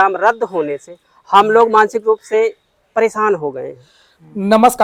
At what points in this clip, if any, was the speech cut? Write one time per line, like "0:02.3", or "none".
none